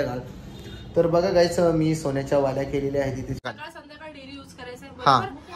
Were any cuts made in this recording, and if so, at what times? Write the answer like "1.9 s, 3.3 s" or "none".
3.4 s